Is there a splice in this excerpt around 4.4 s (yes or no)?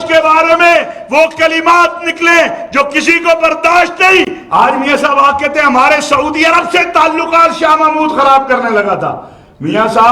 yes